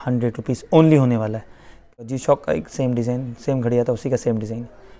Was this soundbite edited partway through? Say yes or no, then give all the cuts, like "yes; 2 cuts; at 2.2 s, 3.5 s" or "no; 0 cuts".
yes; 1 cut; at 2.0 s